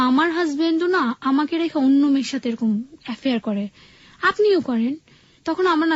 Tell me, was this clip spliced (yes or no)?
no